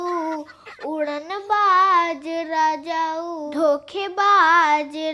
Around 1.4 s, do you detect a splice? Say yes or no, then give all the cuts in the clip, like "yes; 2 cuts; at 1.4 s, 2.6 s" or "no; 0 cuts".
no; 1 cut; at 3.5 s